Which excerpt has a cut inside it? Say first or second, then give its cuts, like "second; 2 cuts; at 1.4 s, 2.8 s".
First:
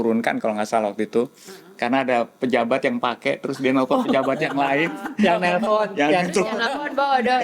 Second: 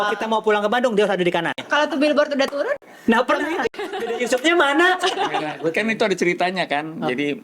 second; 3 cuts; at 1.6 s, 3.9 s, 5.5 s